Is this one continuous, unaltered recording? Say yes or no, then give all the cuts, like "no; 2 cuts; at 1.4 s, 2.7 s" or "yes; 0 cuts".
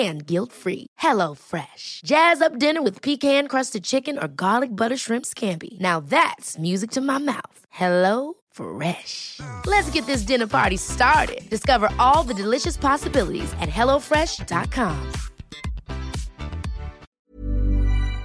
no; 1 cut; at 17.1 s